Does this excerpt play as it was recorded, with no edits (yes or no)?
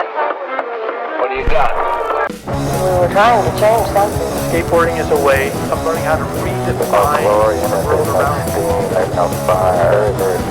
yes